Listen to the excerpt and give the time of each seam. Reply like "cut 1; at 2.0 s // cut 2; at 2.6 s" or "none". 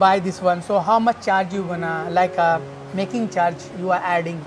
none